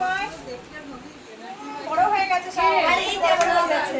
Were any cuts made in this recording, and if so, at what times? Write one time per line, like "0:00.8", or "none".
none